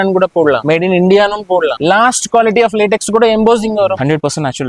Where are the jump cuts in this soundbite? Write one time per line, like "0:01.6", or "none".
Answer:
0:01.8
0:03.9